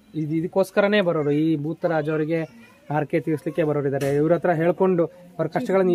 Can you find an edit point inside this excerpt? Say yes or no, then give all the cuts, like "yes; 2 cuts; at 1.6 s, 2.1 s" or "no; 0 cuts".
no; 0 cuts